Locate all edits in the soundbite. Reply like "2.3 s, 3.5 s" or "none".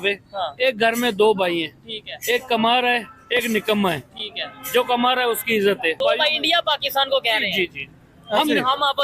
6.0 s

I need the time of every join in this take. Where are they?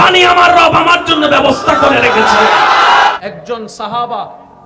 3.1 s

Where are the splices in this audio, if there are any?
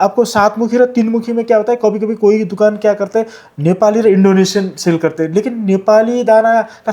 none

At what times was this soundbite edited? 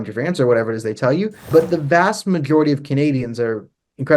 1.5 s

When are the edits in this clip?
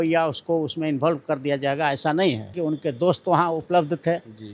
2.5 s

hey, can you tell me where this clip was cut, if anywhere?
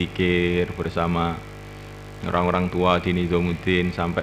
none

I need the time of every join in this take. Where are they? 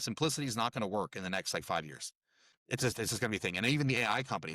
2.3 s

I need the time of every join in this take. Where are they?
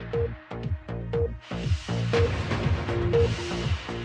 none

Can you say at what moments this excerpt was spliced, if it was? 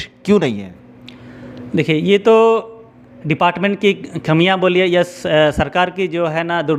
none

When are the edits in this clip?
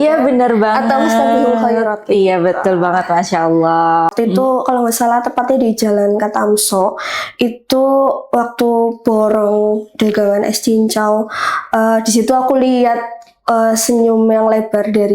4.1 s

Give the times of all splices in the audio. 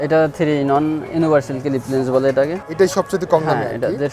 none

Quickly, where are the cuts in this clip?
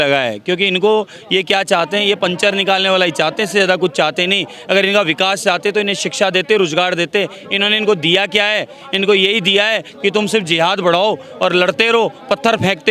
none

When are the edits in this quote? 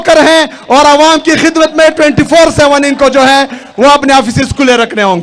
none

